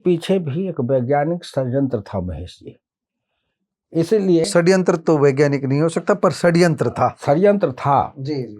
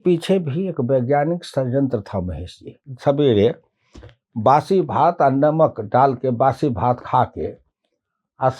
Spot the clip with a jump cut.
second; 1 cut; at 2.9 s

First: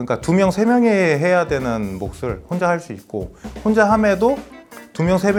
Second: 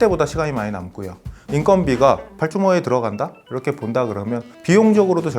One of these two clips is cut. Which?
second; 4 cuts; at 1.4 s, 2.3 s, 3.4 s, 4.5 s

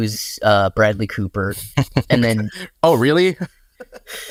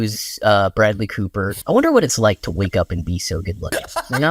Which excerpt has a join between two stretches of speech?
second; 1 cut; at 1.5 s

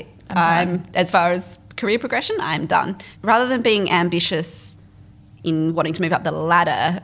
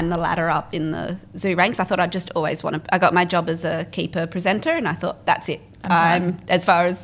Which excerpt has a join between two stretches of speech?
first; 1 cut; at 3.0 s

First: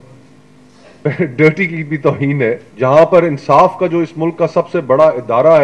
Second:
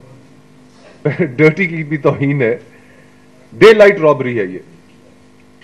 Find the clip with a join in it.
first; 1 cut; at 2.7 s

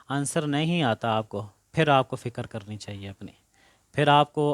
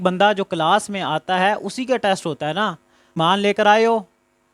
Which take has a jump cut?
second; 1 cut; at 3.2 s

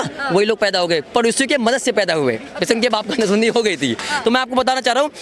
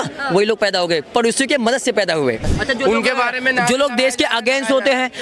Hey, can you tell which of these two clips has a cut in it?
second; 1 cut; at 2.5 s

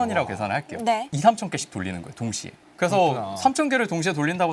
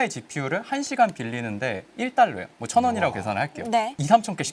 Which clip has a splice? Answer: first; 1 cut; at 2.6 s

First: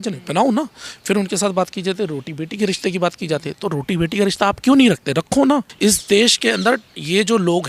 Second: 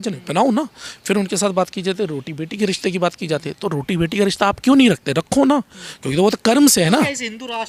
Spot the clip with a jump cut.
first; 1 cut; at 5.7 s

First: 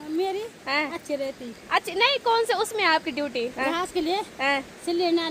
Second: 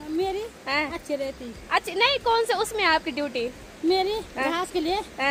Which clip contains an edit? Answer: first; 1 cut; at 3.5 s

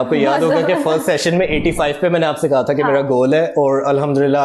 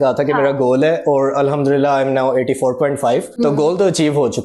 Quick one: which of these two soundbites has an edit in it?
second; 1 cut; at 3.3 s

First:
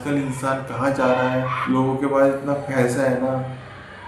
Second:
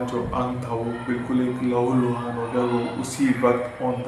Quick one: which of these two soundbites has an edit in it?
first; 1 cut; at 1.6 s

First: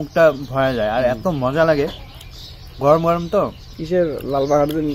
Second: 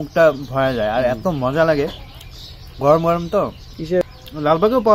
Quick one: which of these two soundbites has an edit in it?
second; 1 cut; at 4.1 s

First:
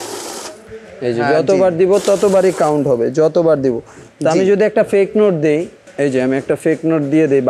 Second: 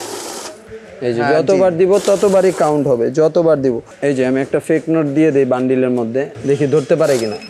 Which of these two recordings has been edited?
second; 2 cuts; at 3.9 s, 6.3 s

